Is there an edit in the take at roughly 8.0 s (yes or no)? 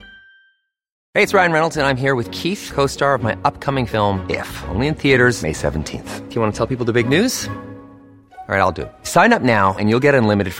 no